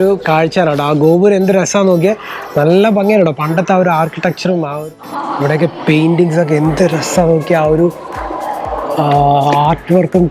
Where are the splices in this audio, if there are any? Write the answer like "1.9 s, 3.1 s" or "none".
4.7 s